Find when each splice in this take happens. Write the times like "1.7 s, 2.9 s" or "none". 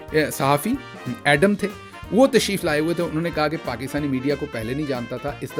none